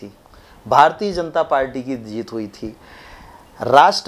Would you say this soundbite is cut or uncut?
uncut